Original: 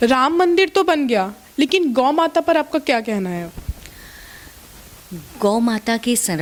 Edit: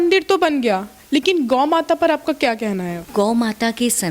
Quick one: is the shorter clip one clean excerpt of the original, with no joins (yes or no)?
no